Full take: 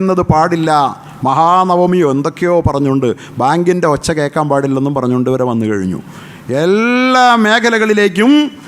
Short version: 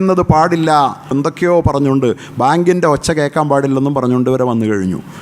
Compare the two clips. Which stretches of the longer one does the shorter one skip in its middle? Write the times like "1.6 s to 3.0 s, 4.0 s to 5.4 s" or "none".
1.1 s to 2.1 s